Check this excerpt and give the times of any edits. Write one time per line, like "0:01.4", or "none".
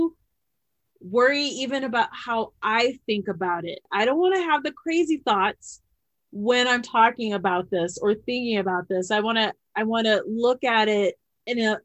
0:03.9

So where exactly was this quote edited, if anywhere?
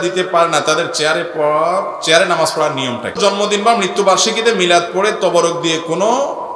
0:03.2

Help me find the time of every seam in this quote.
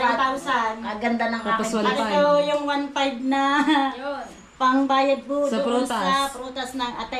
none

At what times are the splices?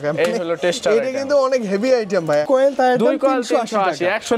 0:02.5

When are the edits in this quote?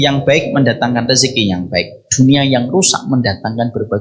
none

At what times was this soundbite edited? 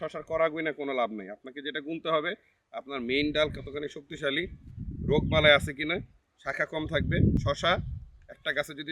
0:07.4

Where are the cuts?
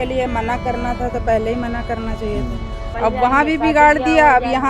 0:02.8

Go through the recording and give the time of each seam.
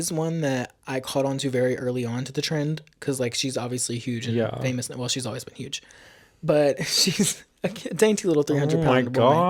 none

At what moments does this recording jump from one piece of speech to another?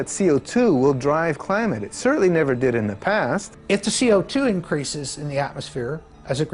0:03.5

